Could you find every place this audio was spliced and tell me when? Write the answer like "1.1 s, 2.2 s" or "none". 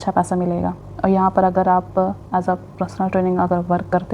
none